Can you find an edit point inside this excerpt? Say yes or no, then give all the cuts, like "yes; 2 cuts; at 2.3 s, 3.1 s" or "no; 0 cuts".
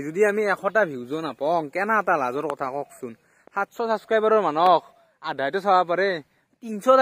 no; 0 cuts